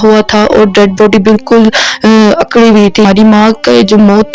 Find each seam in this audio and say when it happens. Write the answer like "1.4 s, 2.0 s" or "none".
3.0 s